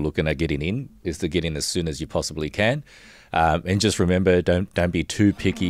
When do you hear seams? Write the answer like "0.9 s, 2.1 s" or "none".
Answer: none